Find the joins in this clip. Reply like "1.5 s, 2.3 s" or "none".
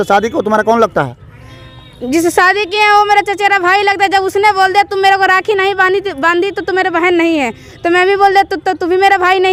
none